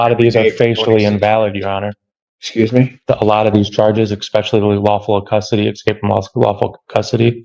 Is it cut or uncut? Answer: uncut